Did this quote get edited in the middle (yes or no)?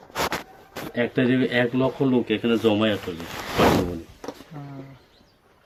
no